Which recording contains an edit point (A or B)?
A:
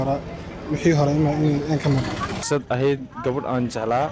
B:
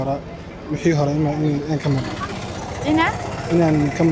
A